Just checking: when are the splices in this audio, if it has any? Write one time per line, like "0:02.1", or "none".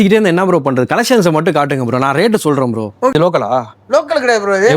0:03.1